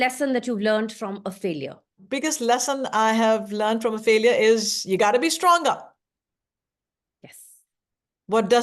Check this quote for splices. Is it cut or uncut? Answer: cut